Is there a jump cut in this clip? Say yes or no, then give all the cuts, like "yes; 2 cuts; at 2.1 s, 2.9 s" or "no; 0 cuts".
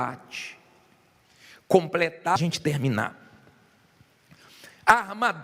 no; 0 cuts